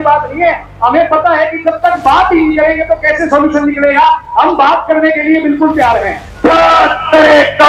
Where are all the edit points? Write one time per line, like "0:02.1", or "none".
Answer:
0:06.2